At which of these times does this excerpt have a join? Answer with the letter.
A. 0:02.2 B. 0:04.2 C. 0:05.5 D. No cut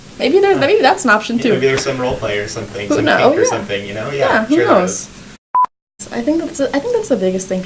C